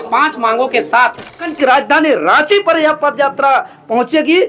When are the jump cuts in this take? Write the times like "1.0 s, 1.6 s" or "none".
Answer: 1.5 s

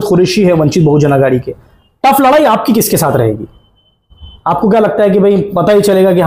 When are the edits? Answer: none

